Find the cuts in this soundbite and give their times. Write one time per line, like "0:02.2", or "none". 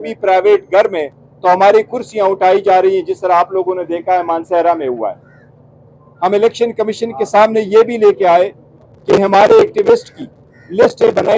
none